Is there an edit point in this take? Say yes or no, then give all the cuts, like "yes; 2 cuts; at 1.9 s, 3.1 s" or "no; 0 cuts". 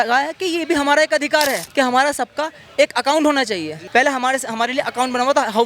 yes; 2 cuts; at 1.6 s, 3.7 s